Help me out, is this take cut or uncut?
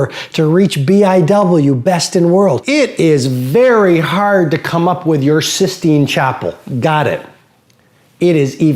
cut